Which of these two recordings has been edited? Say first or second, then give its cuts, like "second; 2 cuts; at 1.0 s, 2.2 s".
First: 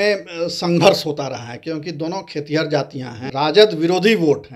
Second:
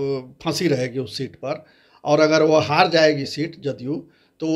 first; 1 cut; at 3.2 s